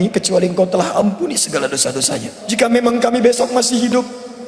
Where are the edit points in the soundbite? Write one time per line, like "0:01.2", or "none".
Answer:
0:02.4